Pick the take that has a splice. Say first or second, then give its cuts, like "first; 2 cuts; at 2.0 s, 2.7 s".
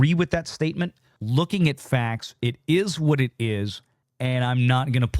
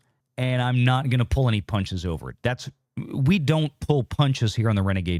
first; 1 cut; at 1.2 s